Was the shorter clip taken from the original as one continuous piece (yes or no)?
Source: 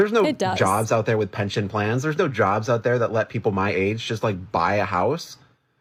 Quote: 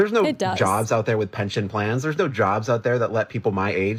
yes